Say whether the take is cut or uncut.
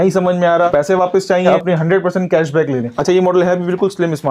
cut